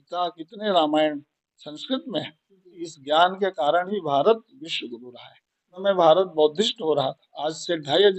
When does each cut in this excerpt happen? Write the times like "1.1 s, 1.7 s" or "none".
2.9 s, 5.8 s